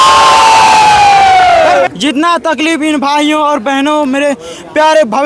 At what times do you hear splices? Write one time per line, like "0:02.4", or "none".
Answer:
0:01.9